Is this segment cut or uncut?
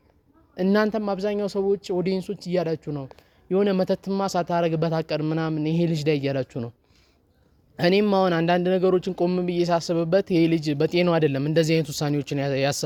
uncut